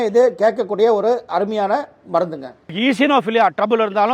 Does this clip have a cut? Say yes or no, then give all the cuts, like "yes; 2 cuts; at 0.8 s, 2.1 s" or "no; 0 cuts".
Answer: yes; 1 cut; at 2.7 s